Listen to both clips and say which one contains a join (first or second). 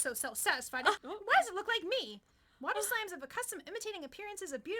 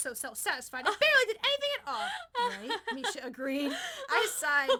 first